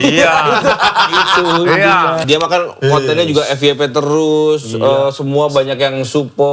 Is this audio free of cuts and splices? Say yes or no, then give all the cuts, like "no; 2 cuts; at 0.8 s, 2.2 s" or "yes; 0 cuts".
no; 1 cut; at 2.2 s